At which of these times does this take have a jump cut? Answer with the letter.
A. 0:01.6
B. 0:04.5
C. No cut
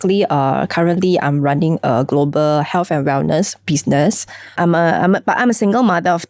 B